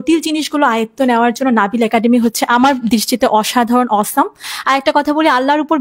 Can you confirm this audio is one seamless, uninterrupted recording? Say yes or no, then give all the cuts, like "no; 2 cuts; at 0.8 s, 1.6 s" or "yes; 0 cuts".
no; 1 cut; at 4.5 s